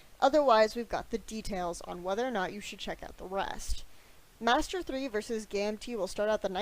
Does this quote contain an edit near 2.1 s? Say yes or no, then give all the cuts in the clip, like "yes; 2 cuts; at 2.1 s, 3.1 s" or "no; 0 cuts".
yes; 1 cut; at 2.1 s